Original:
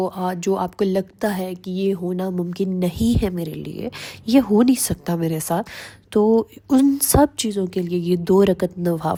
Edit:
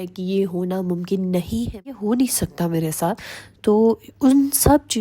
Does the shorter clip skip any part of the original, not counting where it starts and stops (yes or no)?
yes